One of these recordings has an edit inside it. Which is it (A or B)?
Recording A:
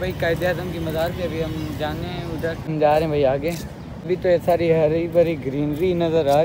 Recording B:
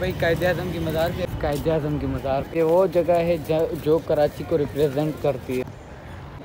B